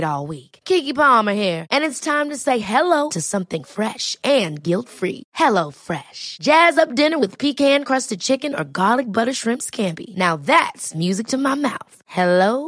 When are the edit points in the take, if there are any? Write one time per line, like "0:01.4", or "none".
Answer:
none